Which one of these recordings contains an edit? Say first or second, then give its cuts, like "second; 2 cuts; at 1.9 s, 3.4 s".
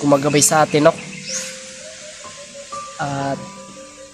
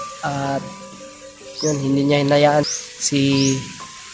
second; 1 cut; at 2.8 s